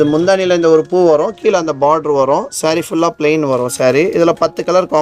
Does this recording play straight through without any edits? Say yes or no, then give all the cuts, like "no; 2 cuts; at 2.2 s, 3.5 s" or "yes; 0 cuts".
yes; 0 cuts